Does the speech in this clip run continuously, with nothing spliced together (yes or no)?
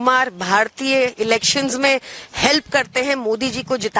yes